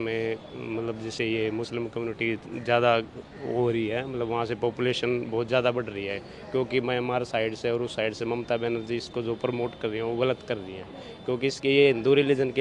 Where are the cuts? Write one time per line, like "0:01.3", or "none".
none